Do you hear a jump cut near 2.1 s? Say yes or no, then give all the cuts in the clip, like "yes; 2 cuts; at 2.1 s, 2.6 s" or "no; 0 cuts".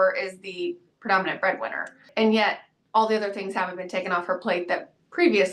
yes; 1 cut; at 2.1 s